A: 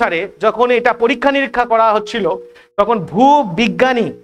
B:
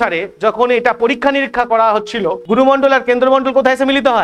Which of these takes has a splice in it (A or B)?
B